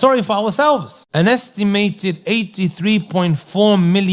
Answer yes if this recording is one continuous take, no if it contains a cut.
no